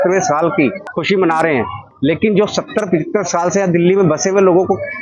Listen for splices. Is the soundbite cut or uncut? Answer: cut